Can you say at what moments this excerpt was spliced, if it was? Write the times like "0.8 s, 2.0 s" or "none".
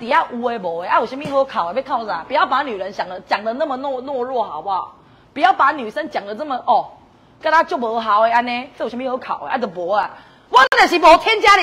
none